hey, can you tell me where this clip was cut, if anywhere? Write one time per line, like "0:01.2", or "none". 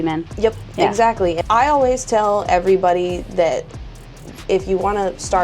0:01.4